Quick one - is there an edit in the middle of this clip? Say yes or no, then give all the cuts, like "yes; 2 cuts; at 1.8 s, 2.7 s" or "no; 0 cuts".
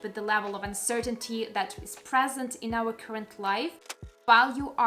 yes; 1 cut; at 3.9 s